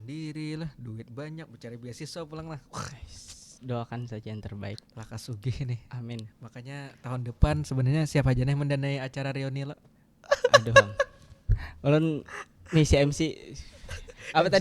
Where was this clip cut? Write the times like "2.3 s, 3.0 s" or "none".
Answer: none